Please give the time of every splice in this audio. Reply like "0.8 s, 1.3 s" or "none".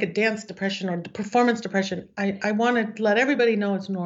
none